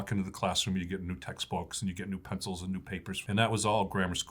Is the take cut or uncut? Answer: cut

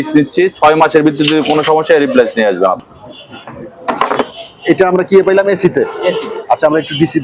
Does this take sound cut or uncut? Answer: cut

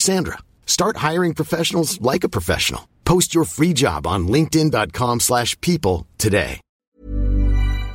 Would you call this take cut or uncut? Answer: cut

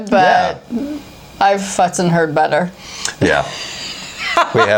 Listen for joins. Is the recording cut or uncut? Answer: uncut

